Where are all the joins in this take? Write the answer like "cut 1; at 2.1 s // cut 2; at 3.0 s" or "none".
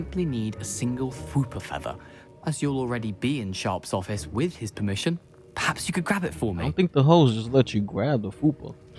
none